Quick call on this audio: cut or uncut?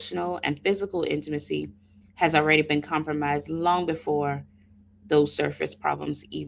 uncut